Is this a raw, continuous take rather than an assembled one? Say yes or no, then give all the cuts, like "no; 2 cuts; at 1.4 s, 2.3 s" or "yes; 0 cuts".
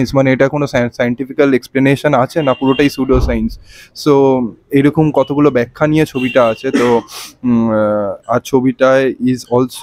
yes; 0 cuts